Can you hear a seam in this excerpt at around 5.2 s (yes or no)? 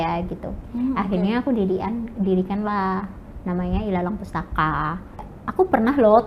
yes